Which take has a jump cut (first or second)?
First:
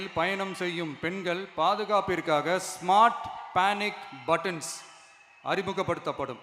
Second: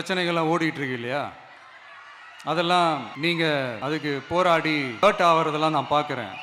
second